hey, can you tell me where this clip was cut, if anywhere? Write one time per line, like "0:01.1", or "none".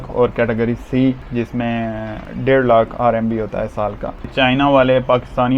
0:04.3